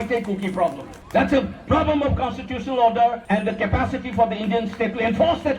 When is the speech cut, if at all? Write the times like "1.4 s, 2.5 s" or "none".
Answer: 0.9 s, 3.2 s